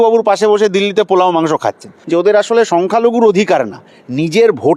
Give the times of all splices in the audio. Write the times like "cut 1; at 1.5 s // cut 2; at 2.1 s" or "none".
cut 1; at 2.0 s